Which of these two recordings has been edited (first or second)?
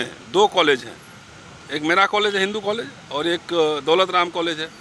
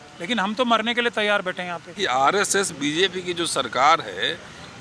second